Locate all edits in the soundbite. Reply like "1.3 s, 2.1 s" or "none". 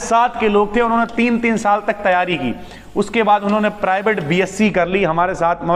none